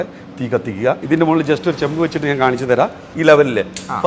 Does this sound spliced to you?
yes; 2 cuts; at 1.0 s, 3.1 s

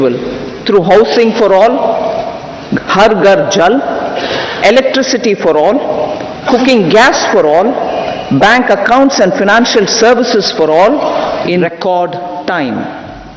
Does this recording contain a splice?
yes; 1 cut; at 11.6 s

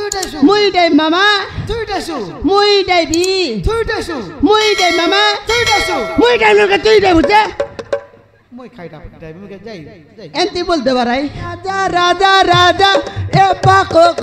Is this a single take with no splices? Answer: no; 1 cut; at 11.7 s

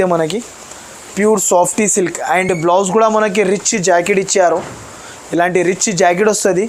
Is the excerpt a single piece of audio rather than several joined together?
yes; 0 cuts

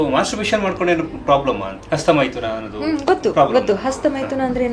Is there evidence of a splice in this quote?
yes; 1 cut; at 1.7 s

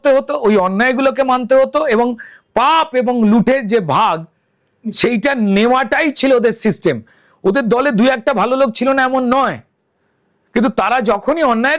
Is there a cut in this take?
no; 0 cuts

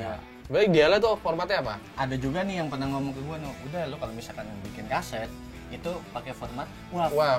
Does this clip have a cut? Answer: yes; 1 cut; at 1.9 s

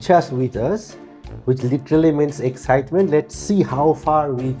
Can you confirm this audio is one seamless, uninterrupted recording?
yes; 0 cuts

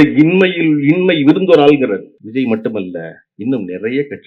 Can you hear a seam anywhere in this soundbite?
yes; 1 cut; at 2.2 s

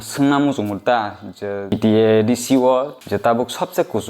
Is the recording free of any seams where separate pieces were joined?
no; 2 cuts; at 1.7 s, 3.0 s

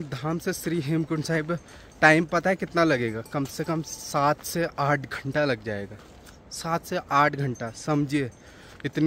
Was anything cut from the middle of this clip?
no; 0 cuts

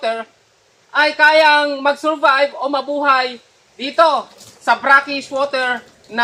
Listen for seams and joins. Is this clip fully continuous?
yes; 0 cuts

